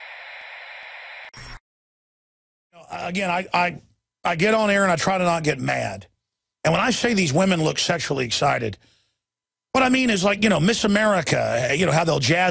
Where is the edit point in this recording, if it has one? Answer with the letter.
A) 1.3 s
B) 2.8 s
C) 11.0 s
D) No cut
A